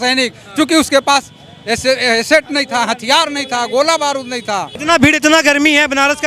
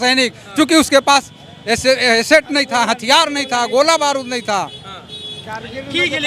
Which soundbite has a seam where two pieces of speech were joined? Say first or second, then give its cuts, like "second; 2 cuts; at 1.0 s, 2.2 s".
first; 1 cut; at 4.8 s